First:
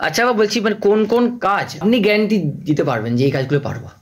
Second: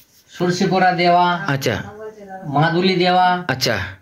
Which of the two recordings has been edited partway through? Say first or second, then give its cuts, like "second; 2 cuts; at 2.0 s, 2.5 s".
first; 1 cut; at 1.8 s